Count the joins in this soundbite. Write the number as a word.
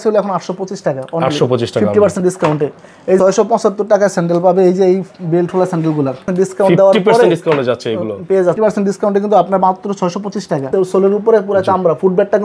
four